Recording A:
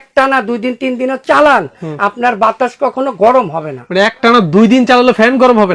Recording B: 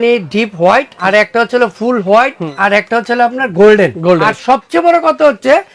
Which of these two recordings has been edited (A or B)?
B